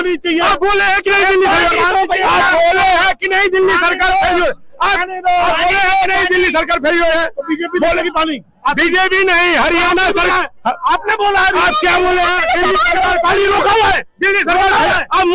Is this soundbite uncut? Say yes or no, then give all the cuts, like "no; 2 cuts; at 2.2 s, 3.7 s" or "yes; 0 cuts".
yes; 0 cuts